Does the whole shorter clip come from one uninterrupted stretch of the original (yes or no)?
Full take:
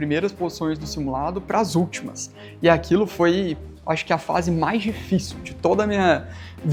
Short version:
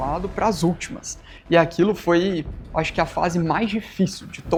yes